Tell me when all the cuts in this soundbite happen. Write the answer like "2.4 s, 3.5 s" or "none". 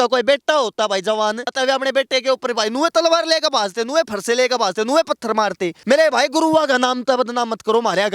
1.5 s, 5.7 s